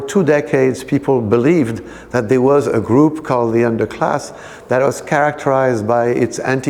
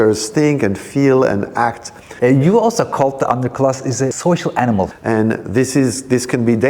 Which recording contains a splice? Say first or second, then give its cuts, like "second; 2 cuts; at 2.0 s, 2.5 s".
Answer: second; 3 cuts; at 2.1 s, 4.2 s, 5.0 s